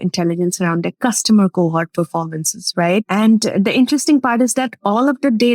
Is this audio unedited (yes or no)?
no